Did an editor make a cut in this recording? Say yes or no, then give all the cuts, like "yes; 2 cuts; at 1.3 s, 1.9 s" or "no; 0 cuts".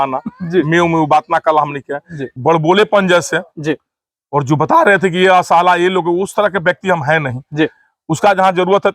yes; 1 cut; at 2.2 s